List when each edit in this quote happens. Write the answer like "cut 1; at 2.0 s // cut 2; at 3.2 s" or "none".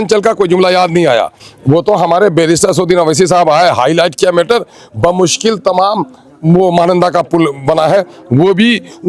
none